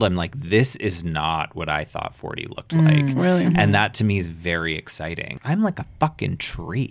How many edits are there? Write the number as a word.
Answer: one